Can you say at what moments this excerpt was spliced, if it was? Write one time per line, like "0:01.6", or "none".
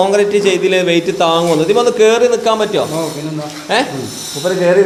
none